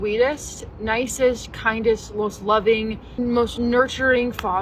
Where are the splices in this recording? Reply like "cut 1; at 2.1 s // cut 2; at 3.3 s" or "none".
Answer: none